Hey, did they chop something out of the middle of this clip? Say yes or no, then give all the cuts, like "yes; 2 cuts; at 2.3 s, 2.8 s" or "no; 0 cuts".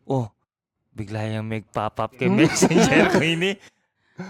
no; 0 cuts